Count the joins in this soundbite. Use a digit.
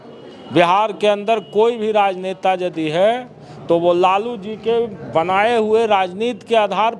0